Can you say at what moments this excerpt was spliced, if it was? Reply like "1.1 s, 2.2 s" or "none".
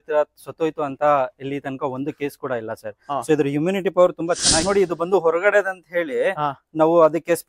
4.6 s

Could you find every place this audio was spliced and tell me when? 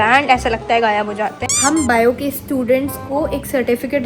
1.5 s

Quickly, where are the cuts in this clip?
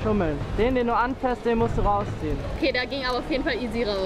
2.6 s

